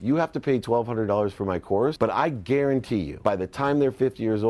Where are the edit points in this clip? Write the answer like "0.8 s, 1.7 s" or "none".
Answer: 2.0 s, 3.1 s